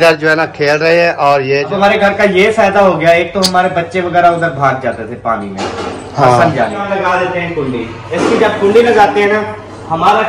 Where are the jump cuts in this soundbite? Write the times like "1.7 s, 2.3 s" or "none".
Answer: 1.7 s, 6.8 s

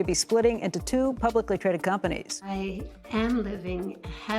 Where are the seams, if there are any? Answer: 2.4 s

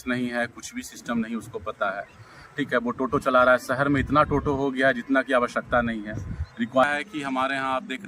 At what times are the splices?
6.8 s

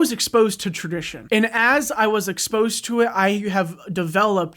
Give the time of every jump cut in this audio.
1.1 s

